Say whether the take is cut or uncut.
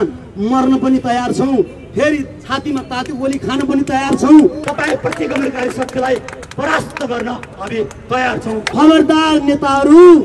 cut